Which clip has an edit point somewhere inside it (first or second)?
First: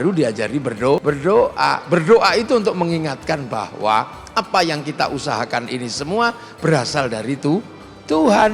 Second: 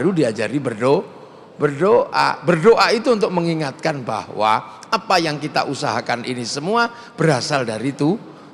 first